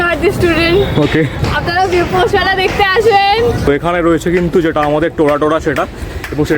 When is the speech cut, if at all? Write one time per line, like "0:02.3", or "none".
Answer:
0:03.7